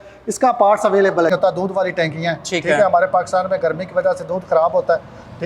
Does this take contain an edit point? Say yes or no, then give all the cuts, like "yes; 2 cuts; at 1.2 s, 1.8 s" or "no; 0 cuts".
yes; 1 cut; at 1.3 s